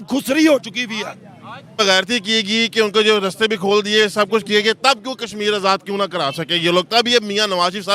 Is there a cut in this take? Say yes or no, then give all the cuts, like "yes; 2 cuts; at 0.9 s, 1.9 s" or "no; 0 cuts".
yes; 1 cut; at 1.8 s